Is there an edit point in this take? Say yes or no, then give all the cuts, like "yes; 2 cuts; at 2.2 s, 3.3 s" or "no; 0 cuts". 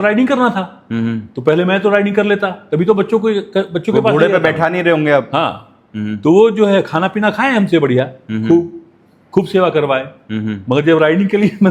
no; 0 cuts